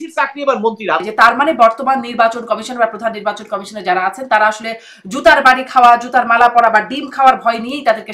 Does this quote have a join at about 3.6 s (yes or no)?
no